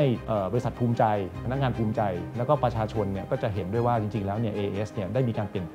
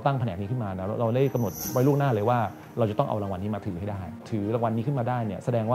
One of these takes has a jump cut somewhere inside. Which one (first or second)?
second